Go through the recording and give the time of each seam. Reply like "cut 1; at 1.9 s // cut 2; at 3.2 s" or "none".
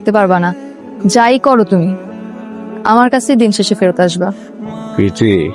none